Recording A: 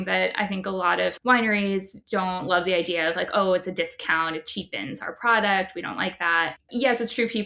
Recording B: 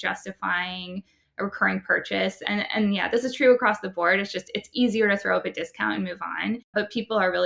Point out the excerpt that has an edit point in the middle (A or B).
A